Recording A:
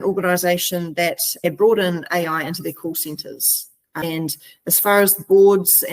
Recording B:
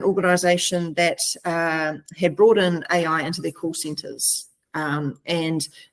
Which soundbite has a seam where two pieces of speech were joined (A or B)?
A